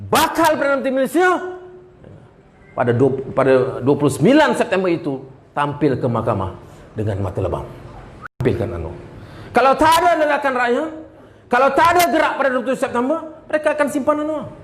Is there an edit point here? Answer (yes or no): yes